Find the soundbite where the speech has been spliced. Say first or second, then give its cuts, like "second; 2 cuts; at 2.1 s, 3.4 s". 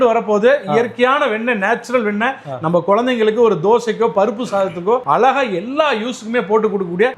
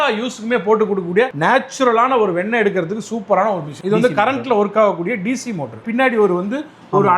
second; 2 cuts; at 3.7 s, 5.8 s